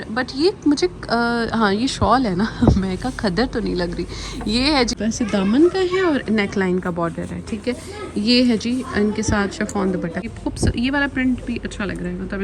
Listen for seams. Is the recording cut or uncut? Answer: cut